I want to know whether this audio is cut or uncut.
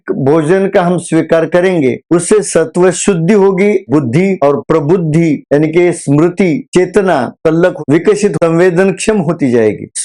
cut